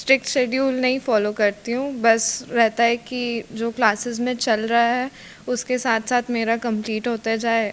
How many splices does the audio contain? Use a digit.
0